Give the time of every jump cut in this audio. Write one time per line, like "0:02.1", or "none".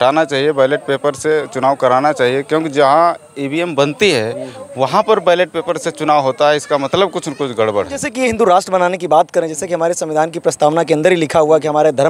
0:08.1